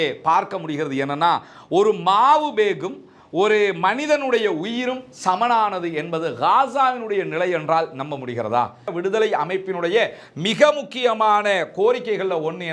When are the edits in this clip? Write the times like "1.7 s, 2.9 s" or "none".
8.8 s